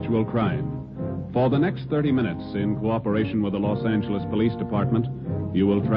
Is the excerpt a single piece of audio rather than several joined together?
yes; 0 cuts

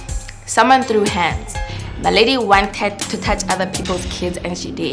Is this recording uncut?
yes; 0 cuts

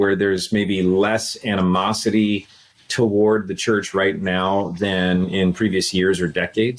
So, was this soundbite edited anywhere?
no; 0 cuts

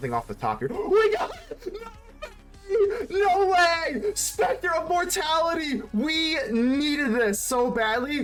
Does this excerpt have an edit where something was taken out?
no; 0 cuts

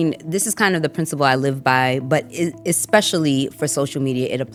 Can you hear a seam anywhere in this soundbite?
no; 0 cuts

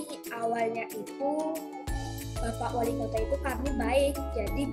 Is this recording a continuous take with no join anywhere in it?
yes; 0 cuts

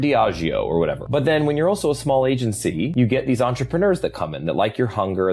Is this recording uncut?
no; 2 cuts; at 1.0 s, 2.9 s

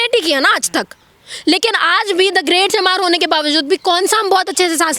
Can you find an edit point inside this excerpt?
no; 0 cuts

